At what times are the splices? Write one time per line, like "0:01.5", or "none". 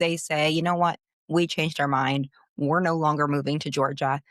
0:01.1